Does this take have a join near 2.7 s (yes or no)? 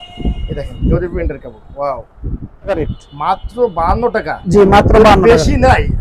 yes